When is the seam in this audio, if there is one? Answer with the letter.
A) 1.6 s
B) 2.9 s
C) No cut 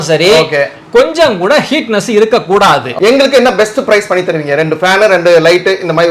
B